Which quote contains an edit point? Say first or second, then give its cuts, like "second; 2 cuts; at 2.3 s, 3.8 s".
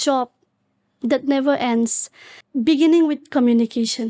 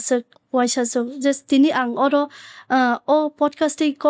first; 1 cut; at 2.3 s